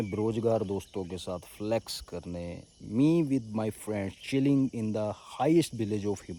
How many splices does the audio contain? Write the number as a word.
zero